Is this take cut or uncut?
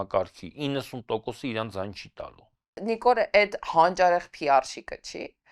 cut